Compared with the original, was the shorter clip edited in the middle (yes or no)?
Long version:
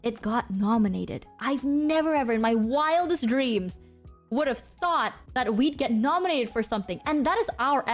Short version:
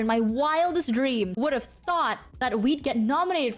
yes